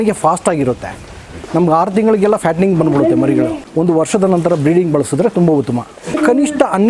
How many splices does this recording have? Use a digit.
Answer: 1